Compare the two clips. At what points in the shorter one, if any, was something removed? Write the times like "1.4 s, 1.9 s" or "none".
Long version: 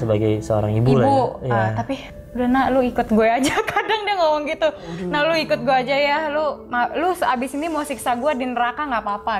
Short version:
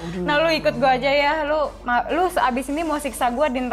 none